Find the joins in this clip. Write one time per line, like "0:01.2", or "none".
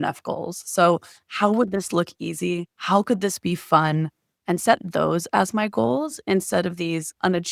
none

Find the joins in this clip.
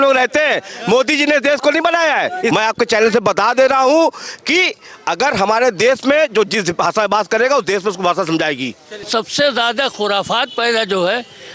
0:02.5
0:09.1

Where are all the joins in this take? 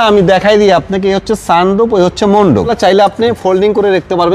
0:02.7

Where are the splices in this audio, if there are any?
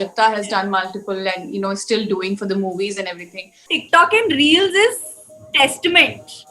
0:03.8

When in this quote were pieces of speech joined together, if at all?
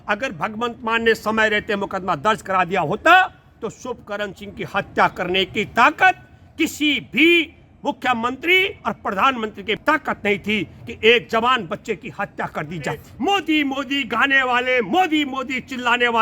0:09.8
0:13.1

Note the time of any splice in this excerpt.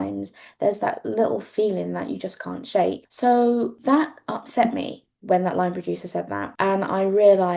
0:03.1
0:03.8
0:06.5

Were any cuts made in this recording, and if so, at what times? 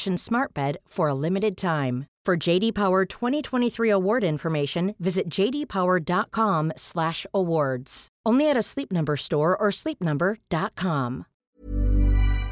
0:11.4

